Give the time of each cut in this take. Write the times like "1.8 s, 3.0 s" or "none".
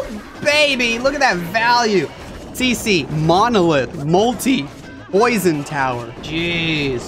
6.2 s